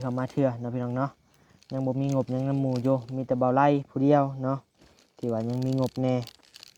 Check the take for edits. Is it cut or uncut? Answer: uncut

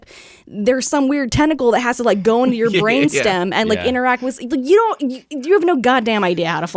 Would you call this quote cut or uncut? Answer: uncut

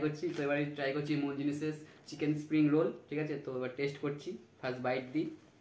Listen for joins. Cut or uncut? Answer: uncut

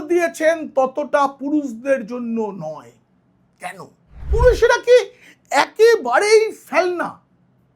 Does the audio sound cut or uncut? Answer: cut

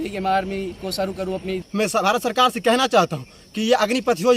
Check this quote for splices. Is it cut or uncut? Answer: cut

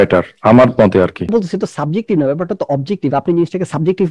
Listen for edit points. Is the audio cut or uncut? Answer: cut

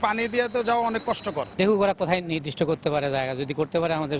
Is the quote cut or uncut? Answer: cut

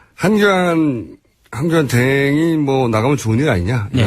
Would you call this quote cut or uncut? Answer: cut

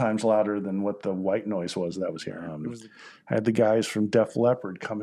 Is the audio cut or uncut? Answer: cut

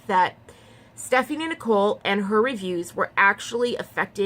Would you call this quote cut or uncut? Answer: uncut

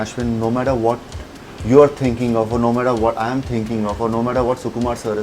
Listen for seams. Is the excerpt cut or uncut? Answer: uncut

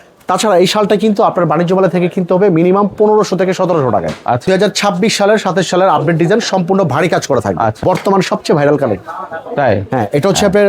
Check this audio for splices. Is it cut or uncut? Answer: cut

